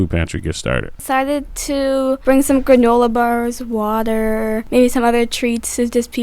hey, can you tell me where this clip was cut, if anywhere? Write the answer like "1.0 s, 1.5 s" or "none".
1.0 s, 2.2 s, 4.6 s